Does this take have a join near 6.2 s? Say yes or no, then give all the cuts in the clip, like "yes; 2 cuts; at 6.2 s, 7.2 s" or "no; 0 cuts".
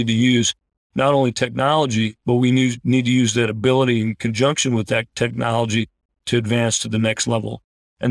yes; 1 cut; at 6.2 s